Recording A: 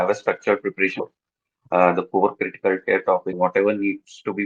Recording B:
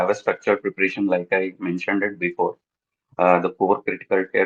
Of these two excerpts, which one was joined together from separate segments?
A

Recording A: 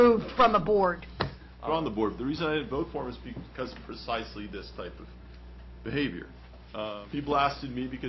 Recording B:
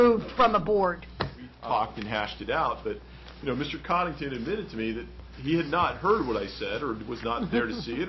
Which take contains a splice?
B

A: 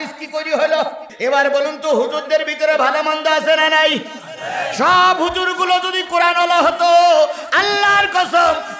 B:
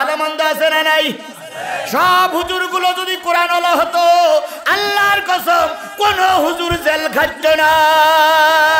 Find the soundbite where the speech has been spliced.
A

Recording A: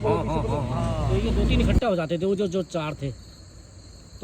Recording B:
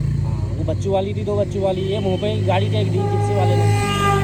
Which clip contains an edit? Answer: A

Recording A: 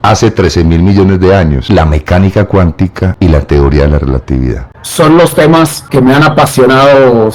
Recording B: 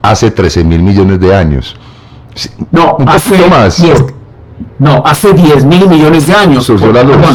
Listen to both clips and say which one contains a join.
A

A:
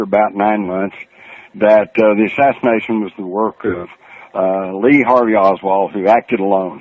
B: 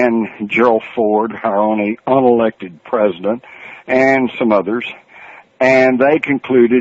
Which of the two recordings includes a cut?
B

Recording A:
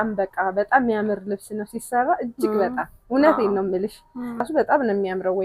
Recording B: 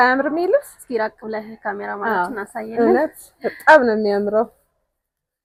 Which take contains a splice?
A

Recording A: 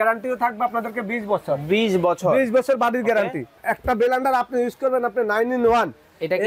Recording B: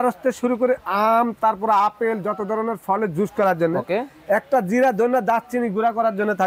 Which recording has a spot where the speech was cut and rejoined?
A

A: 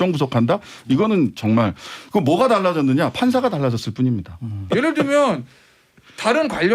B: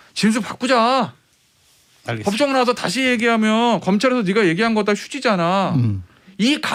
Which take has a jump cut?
A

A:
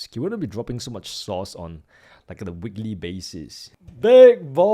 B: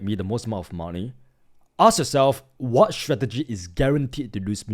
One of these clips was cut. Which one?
A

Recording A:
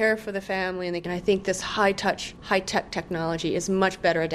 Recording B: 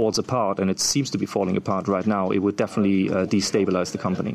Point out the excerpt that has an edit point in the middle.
A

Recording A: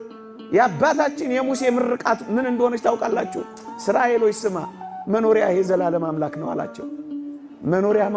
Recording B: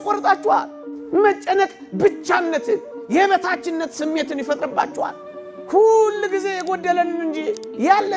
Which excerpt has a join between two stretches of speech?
B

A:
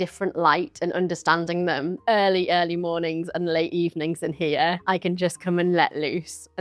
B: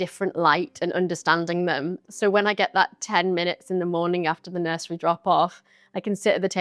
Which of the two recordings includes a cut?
A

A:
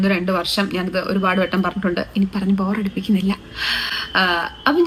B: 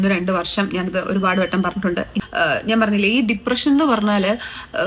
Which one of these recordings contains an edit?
B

